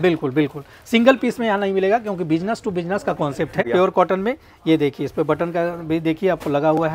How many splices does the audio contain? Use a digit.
1